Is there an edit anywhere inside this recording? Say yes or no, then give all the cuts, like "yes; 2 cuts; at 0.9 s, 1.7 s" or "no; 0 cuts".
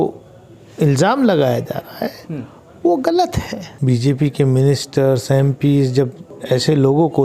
yes; 2 cuts; at 3.7 s, 6.3 s